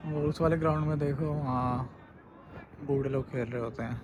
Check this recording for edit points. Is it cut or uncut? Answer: uncut